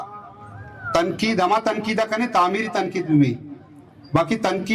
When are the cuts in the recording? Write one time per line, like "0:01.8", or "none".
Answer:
none

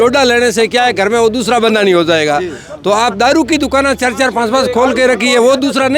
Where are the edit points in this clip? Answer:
none

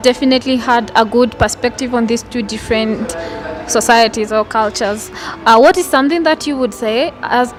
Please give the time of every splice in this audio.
none

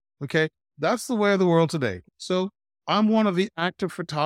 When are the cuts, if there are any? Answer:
0:02.0

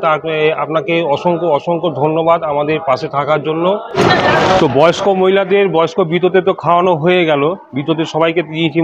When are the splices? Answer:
0:03.9

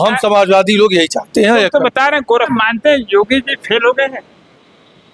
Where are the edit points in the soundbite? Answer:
0:02.5

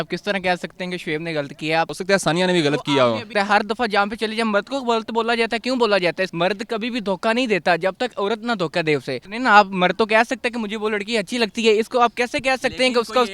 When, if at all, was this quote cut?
0:01.9
0:03.3
0:06.3
0:09.2

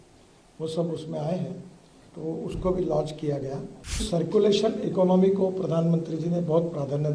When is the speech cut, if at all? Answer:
0:04.0

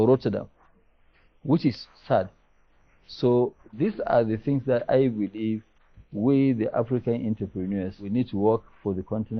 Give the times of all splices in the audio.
0:08.1

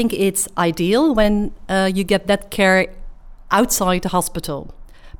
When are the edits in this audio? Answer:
none

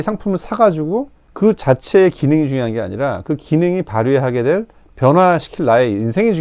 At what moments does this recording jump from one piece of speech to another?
0:01.2

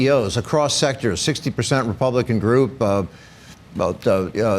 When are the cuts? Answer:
none

